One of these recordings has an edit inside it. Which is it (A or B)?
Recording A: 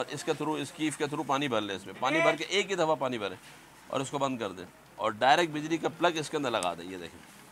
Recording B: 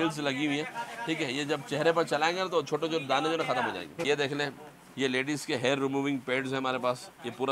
B